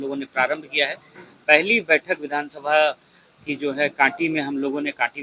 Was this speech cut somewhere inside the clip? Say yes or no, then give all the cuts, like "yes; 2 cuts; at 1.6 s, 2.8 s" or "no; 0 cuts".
no; 0 cuts